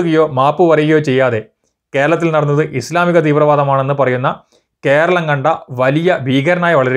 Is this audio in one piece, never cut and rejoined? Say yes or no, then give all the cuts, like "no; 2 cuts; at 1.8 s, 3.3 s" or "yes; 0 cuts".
yes; 0 cuts